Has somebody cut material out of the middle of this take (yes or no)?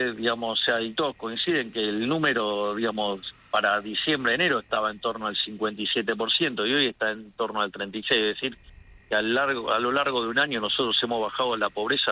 no